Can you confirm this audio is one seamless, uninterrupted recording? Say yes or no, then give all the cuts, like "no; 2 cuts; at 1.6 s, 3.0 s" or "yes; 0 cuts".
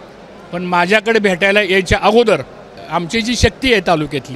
no; 1 cut; at 2.7 s